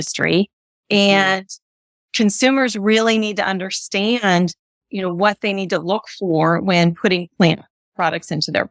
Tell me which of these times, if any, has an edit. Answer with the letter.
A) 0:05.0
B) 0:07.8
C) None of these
B